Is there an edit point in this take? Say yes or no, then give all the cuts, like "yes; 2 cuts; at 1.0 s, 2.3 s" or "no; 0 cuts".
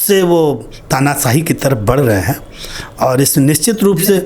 no; 0 cuts